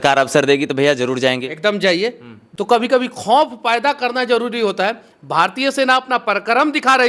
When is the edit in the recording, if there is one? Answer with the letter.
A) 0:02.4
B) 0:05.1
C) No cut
A